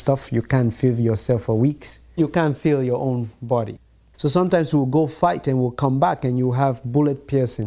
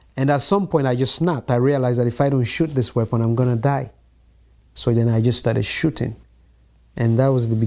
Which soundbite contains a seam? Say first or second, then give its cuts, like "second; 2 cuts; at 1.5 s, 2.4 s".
first; 2 cuts; at 2.2 s, 3.8 s